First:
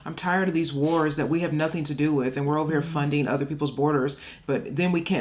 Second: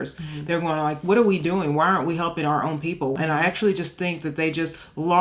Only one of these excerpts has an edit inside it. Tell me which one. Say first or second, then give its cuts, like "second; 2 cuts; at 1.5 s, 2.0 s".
second; 1 cut; at 3.1 s